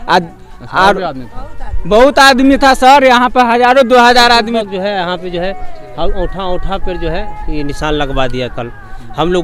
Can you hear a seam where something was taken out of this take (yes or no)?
yes